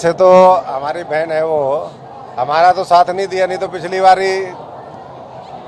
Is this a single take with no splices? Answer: yes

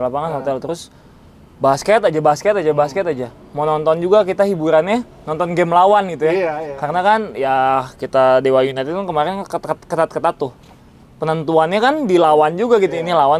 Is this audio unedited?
yes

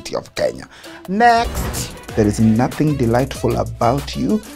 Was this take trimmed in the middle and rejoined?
yes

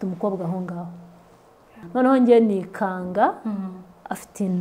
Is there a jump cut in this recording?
yes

